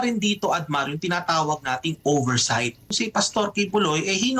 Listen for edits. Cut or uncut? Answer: cut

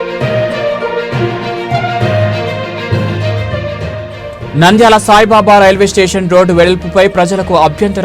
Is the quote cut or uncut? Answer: cut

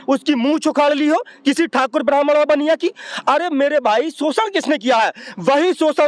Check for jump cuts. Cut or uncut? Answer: uncut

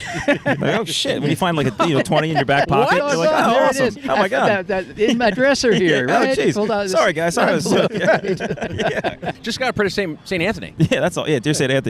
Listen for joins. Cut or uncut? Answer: cut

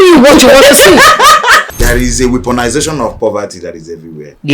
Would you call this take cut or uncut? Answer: cut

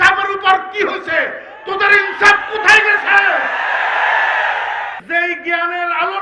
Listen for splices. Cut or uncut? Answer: cut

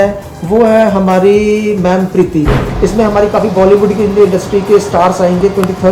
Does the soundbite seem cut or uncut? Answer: cut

